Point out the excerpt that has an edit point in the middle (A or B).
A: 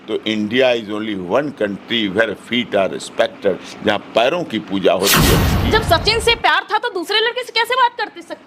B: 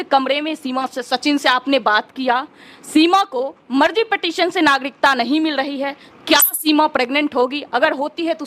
A